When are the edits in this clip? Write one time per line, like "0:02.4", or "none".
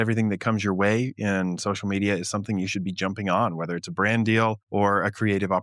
0:04.6